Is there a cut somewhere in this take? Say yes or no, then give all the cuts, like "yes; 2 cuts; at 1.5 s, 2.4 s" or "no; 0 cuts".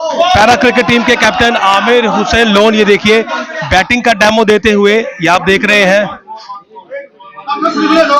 no; 0 cuts